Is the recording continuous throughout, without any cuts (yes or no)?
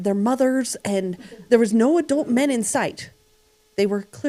yes